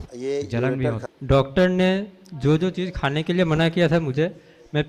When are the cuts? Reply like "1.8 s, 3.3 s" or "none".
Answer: 1.0 s

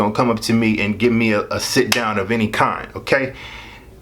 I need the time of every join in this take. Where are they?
none

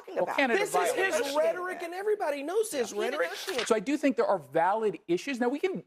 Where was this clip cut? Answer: 3.5 s

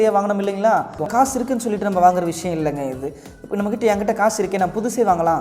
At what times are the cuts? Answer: 1.0 s

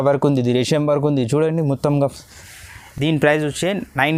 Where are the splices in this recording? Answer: none

